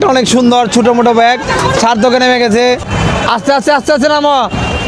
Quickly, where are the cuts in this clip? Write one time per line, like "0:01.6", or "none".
0:02.8